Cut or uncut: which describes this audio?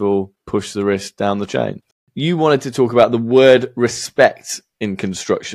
cut